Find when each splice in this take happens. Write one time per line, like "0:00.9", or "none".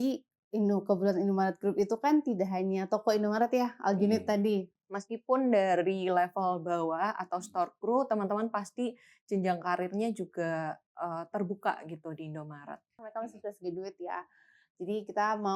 0:04.8
0:13.1